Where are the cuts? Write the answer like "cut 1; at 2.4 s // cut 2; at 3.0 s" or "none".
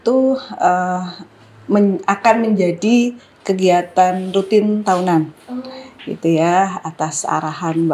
none